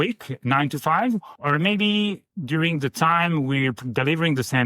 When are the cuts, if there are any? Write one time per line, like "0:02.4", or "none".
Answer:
0:01.3
0:02.3